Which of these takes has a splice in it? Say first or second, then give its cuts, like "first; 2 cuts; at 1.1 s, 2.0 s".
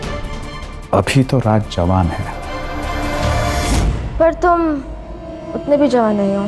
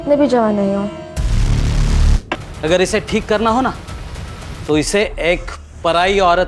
second; 1 cut; at 2.3 s